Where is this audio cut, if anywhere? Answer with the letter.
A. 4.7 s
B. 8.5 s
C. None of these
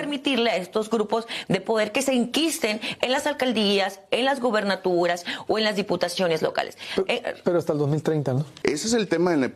B